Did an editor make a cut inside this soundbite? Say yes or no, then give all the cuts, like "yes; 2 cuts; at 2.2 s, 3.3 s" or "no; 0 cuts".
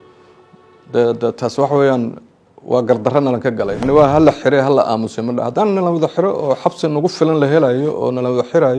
yes; 1 cut; at 3.8 s